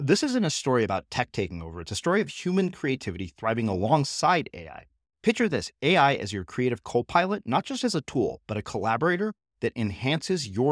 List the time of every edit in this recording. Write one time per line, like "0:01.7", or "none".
none